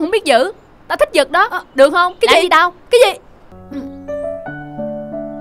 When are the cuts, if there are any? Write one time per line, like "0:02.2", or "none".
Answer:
0:03.4